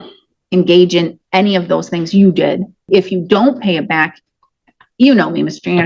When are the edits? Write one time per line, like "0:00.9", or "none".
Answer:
0:02.8